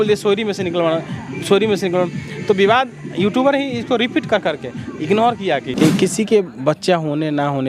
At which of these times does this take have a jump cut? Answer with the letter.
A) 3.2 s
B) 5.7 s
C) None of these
B